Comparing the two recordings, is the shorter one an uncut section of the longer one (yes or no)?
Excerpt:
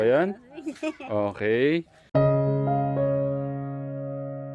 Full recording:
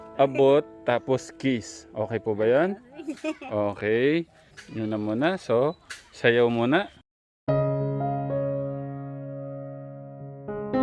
no